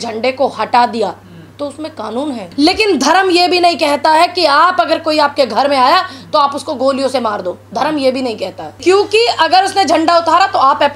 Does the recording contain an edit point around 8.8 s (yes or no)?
yes